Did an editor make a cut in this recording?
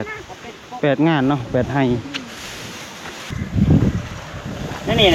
yes; 1 cut; at 3.3 s

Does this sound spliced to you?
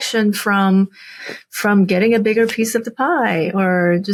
no; 0 cuts

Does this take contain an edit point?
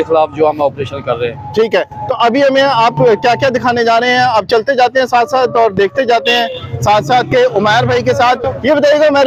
no; 0 cuts

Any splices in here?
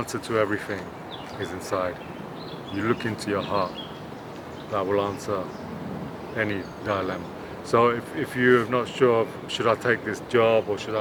no; 0 cuts

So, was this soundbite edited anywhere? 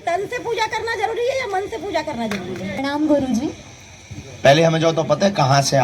yes; 1 cut; at 2.8 s

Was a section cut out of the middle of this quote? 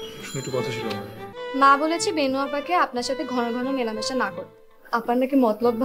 yes; 1 cut; at 1.3 s

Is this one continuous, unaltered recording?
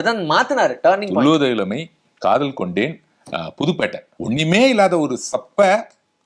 no; 1 cut; at 4.1 s

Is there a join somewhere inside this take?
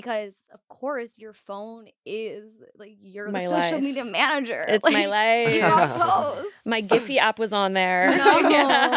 no; 0 cuts

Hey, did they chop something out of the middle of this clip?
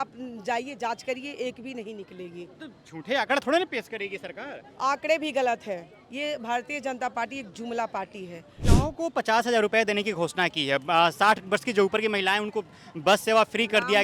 yes; 1 cut; at 8.6 s

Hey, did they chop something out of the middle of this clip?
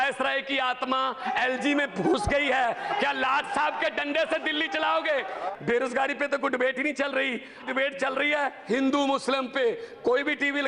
yes; 2 cuts; at 5.4 s, 7.6 s

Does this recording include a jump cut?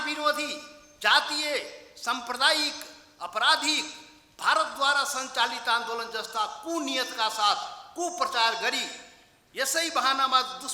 no; 0 cuts

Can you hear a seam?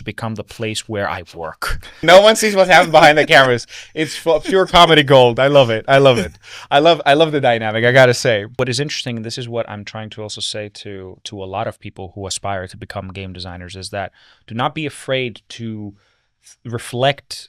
yes; 2 cuts; at 2.0 s, 8.5 s

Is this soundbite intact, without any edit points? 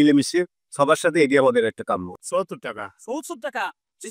no; 1 cut; at 2.1 s

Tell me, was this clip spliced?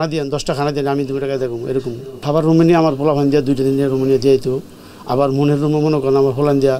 yes; 1 cut; at 2.2 s

